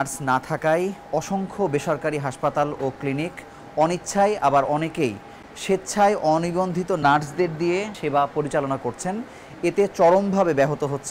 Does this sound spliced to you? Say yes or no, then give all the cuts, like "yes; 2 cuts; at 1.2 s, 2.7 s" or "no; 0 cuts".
no; 0 cuts